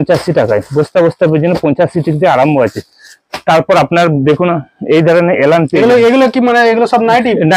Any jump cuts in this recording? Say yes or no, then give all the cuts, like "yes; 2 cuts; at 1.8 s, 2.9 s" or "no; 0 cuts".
no; 0 cuts